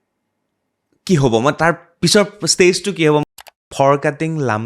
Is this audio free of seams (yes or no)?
no